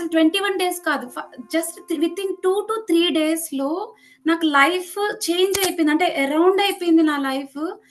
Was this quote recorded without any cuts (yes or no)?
yes